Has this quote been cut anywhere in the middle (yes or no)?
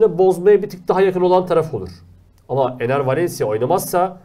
no